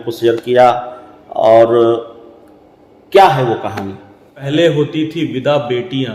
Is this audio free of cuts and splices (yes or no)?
no